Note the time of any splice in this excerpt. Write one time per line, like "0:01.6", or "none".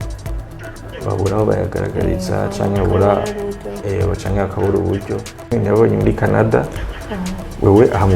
0:05.5